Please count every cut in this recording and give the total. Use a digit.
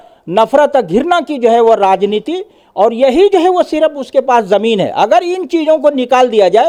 0